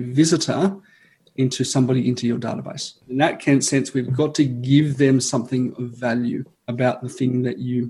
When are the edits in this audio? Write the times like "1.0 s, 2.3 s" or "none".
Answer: 2.9 s, 6.6 s